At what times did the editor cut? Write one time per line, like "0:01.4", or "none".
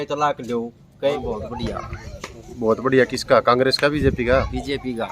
0:01.1